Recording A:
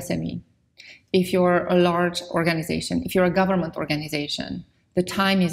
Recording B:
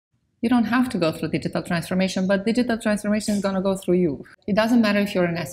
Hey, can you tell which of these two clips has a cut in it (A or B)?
B